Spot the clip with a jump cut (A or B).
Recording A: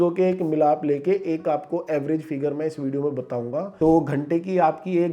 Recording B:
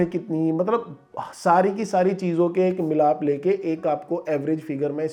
A